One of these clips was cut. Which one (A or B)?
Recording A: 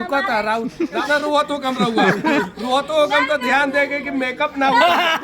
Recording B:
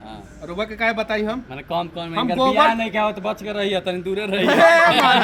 A